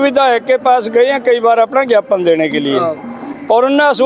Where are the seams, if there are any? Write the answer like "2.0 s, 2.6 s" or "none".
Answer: none